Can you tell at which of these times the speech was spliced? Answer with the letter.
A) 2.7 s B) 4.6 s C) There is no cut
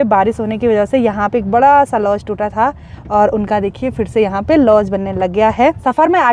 C